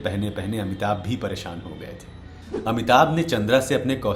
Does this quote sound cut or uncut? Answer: uncut